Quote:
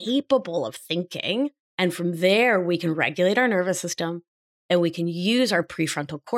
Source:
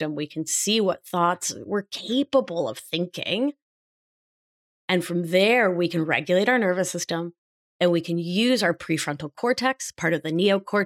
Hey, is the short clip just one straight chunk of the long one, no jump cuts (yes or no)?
no